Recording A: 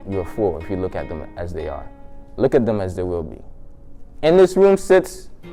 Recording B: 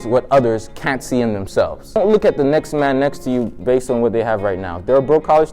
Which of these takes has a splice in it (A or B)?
B